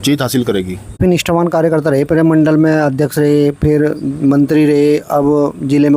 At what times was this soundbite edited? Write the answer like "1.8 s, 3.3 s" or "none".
1.0 s